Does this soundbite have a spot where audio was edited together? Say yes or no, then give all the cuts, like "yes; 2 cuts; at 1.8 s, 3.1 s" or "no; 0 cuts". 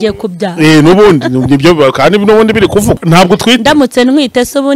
yes; 1 cut; at 3.0 s